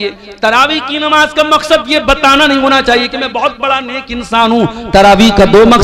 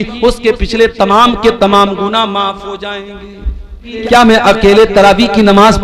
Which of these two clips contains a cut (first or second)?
second